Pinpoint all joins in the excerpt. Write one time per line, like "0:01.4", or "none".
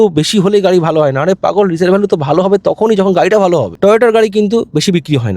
0:03.7